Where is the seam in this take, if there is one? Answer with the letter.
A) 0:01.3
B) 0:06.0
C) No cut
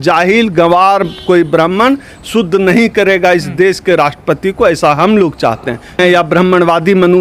B